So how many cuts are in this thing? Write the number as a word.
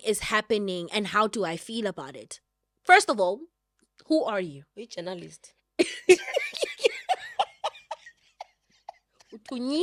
zero